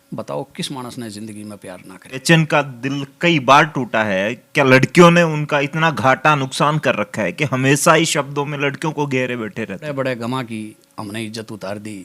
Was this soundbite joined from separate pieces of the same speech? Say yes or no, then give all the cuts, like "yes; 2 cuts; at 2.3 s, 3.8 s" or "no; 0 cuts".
yes; 2 cuts; at 2.3 s, 9.9 s